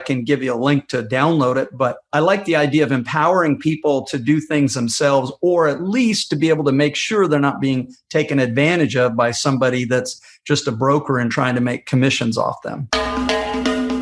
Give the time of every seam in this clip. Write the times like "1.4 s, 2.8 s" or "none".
12.9 s